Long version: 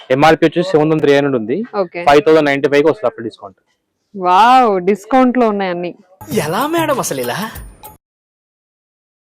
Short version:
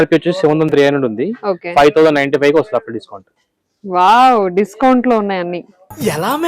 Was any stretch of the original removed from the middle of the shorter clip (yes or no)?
no